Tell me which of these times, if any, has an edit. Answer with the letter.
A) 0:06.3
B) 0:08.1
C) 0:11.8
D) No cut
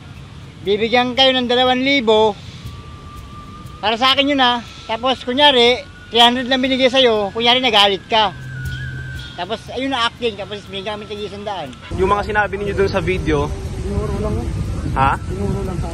C